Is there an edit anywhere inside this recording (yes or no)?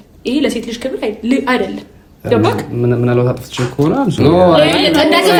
no